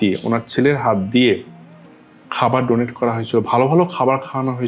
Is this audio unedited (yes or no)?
yes